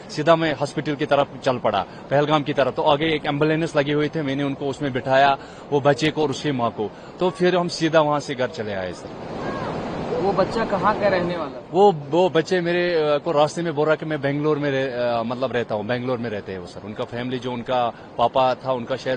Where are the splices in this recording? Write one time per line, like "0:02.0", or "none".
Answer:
none